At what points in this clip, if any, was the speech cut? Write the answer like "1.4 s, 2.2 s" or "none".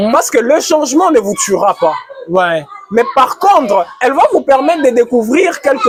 none